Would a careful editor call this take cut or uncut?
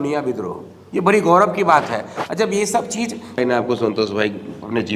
cut